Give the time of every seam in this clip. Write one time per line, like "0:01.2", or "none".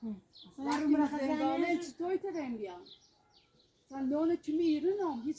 none